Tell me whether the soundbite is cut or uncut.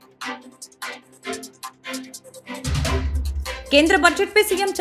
cut